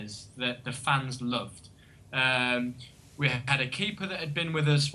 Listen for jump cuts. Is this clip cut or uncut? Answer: uncut